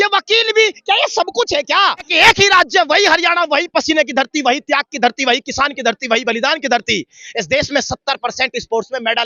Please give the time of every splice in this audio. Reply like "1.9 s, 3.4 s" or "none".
2.1 s